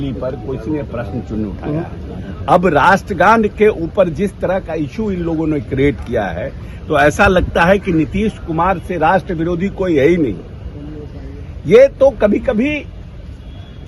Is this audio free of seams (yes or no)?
yes